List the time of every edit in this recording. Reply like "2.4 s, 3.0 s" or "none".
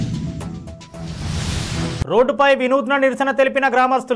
none